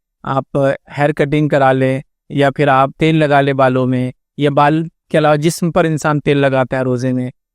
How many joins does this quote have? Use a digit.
1